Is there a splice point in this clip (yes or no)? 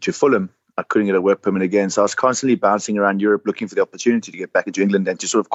no